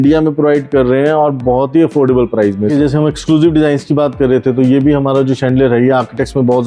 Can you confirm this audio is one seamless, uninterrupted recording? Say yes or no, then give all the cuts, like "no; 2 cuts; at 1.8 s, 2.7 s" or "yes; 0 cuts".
no; 1 cut; at 2.7 s